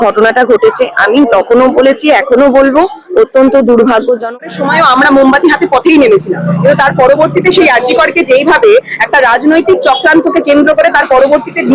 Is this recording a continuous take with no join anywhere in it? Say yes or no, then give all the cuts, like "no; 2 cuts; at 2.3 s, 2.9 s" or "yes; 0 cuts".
no; 1 cut; at 4.3 s